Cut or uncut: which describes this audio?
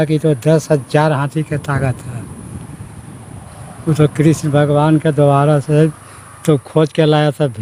uncut